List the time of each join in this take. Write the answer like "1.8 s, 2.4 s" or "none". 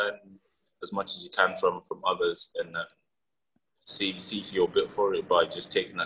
none